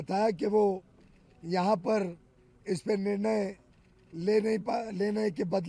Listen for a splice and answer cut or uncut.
uncut